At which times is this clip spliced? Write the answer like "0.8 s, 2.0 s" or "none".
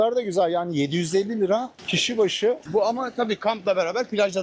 none